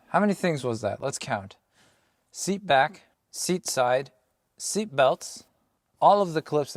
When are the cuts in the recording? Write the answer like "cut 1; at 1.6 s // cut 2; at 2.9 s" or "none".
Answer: none